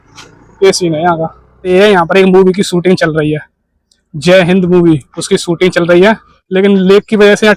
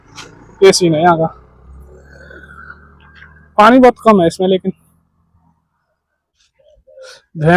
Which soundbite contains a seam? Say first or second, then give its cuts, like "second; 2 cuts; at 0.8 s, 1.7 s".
first; 2 cuts; at 1.6 s, 6.3 s